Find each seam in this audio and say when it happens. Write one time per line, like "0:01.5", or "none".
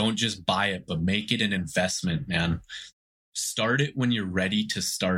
0:02.8